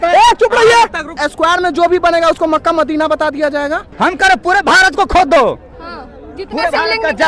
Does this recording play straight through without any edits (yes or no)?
no